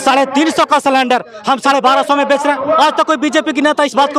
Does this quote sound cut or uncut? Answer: uncut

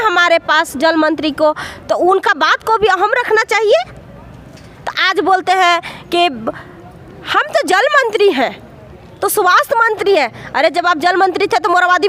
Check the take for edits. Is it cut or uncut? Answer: uncut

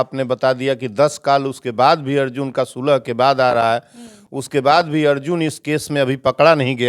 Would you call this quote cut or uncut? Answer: uncut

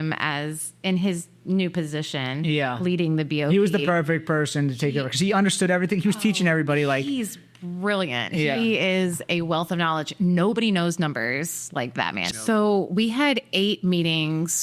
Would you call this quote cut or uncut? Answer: cut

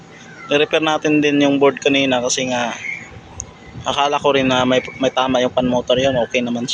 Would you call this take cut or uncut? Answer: uncut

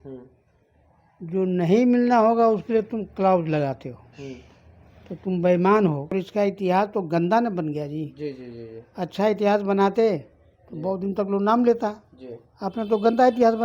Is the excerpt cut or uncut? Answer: cut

